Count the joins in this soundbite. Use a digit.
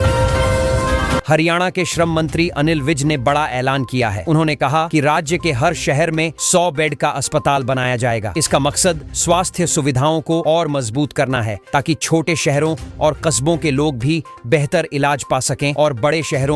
1